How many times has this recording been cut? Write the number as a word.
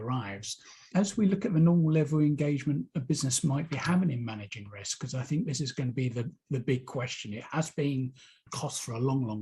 two